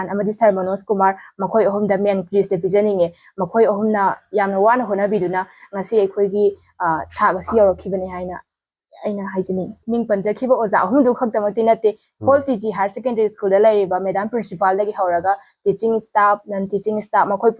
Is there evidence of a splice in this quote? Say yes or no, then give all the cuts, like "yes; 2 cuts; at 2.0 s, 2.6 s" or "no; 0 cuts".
no; 0 cuts